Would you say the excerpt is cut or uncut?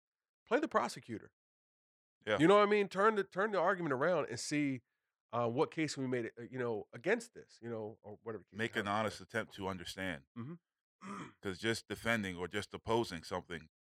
uncut